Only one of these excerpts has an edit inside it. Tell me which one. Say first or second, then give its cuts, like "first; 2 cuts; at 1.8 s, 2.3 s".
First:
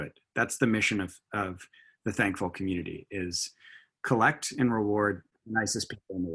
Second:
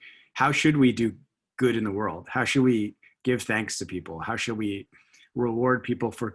first; 1 cut; at 5.3 s